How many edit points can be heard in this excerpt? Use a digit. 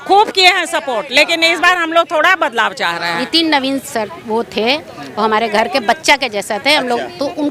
1